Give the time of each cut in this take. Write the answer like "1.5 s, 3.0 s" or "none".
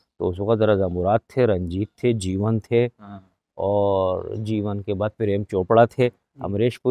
none